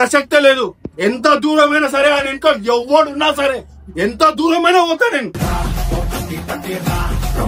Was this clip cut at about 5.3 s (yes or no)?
yes